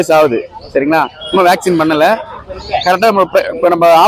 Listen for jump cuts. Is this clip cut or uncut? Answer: uncut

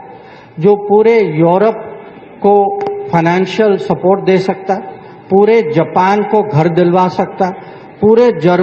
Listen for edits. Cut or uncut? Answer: uncut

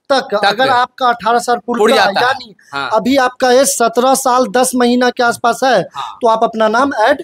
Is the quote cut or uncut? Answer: uncut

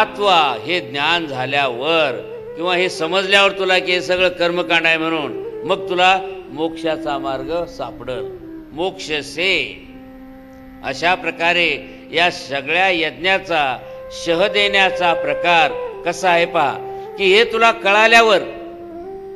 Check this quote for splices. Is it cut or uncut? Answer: uncut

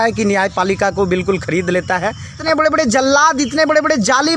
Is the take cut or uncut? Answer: cut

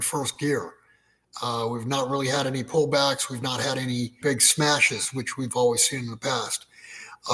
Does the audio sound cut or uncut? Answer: cut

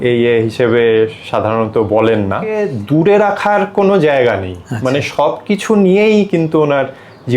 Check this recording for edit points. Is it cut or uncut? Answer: cut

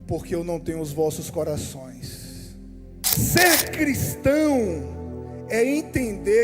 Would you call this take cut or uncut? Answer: cut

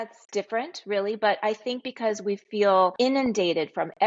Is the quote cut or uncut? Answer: cut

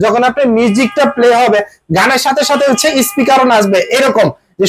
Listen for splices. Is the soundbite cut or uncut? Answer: uncut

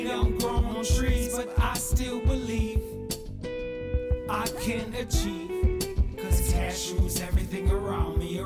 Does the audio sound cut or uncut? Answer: uncut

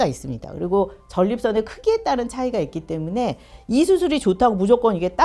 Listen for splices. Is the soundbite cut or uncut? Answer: uncut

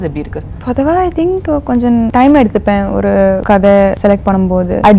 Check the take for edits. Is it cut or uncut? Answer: cut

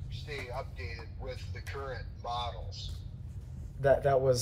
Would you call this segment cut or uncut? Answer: uncut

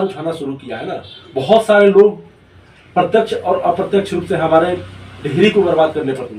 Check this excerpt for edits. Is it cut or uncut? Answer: uncut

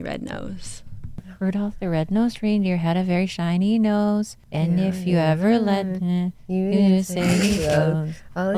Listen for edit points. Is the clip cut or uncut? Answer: cut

